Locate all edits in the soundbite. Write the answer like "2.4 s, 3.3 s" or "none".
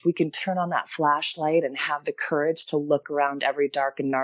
3.0 s